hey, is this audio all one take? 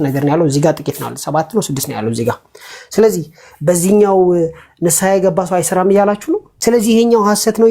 no; 1 cut; at 6.5 s

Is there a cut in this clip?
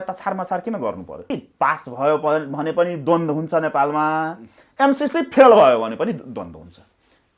yes; 1 cut; at 1.3 s

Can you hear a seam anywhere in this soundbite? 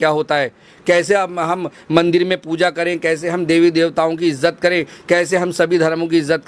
no; 0 cuts

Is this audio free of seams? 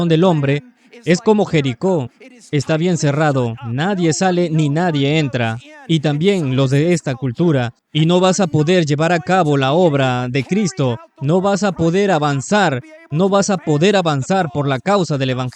no; 1 cut; at 7.8 s

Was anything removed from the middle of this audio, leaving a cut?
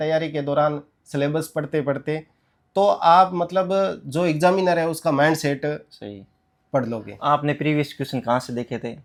no; 0 cuts

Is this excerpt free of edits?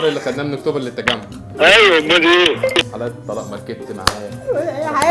yes; 0 cuts

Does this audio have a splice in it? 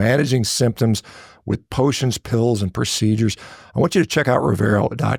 no; 0 cuts

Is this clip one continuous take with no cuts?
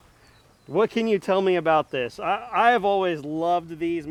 yes; 0 cuts

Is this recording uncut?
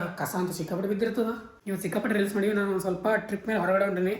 no; 1 cut; at 1.5 s

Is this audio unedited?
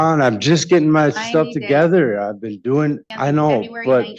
no; 1 cut; at 3.1 s

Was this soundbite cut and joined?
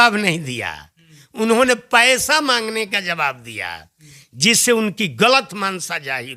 no; 0 cuts

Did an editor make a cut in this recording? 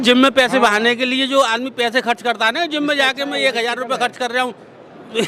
no; 0 cuts

